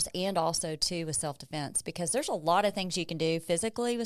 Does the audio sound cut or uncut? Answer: uncut